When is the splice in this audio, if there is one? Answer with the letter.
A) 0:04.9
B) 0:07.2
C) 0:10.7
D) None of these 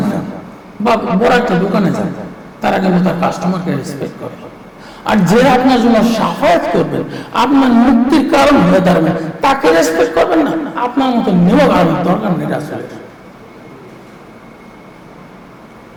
D